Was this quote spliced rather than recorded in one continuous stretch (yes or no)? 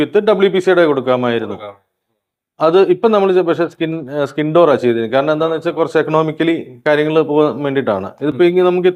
no